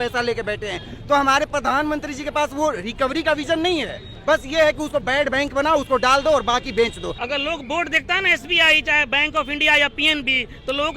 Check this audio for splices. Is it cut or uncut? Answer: cut